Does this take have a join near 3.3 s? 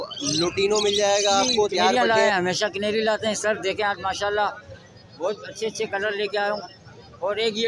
no; 1 cut; at 1.9 s

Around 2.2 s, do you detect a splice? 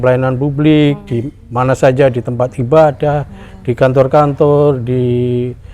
no; 0 cuts

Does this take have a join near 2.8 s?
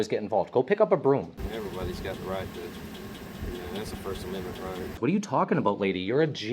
no; 2 cuts; at 1.4 s, 5.0 s

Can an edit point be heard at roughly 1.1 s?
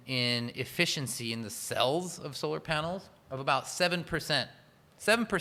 no; 0 cuts

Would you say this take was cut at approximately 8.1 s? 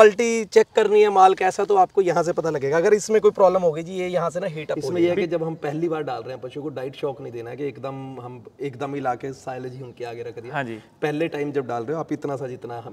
no; 1 cut; at 4.8 s

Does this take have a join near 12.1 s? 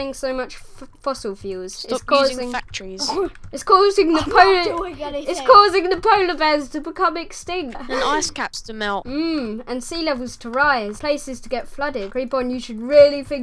yes; 4 cuts; at 7.8 s, 9.1 s, 11.0 s, 12.1 s

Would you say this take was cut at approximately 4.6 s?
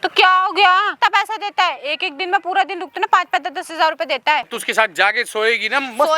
yes; 2 cuts; at 0.9 s, 4.6 s

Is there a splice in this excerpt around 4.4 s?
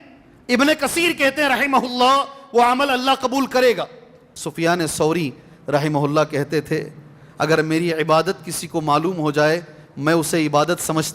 yes; 1 cut; at 4.4 s

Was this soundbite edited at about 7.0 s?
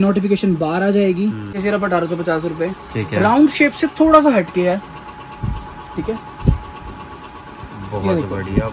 no; 1 cut; at 1.6 s

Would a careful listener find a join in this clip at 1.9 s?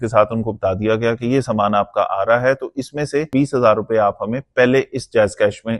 no; 1 cut; at 3.3 s

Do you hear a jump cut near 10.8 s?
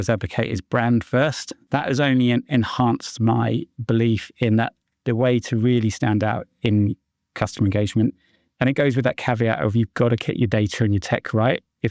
no; 1 cut; at 1.5 s

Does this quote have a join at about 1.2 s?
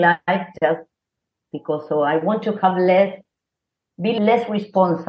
no; 1 cut; at 4.2 s

